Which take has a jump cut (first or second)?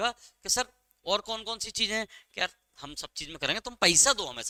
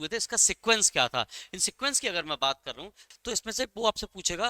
second